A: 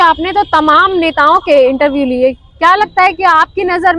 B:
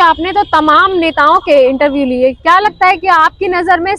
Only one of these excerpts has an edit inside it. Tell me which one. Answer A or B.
B